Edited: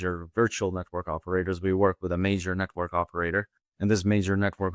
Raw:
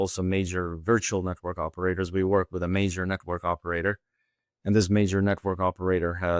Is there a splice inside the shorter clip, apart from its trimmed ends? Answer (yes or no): yes